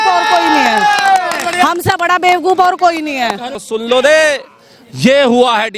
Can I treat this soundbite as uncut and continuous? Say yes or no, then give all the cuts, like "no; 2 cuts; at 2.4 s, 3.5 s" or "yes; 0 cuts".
no; 1 cut; at 3.5 s